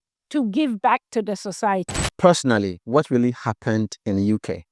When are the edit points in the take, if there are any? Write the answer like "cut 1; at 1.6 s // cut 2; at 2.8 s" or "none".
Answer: cut 1; at 2.0 s